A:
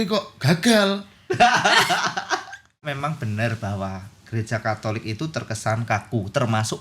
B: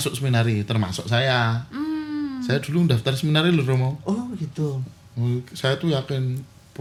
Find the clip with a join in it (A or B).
A